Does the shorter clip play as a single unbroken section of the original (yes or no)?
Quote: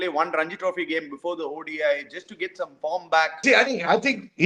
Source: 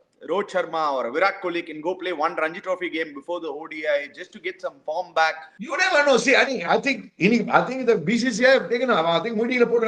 no